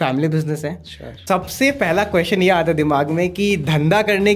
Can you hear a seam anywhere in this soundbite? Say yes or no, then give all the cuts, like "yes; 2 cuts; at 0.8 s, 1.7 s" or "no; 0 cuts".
yes; 1 cut; at 1.1 s